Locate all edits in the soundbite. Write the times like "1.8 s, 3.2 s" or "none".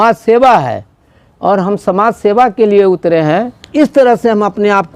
3.6 s

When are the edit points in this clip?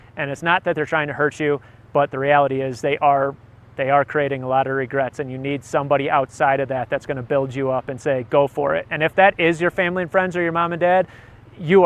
none

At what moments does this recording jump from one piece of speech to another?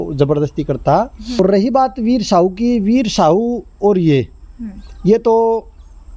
1.4 s

